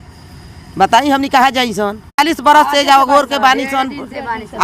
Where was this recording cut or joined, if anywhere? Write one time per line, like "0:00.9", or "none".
0:02.2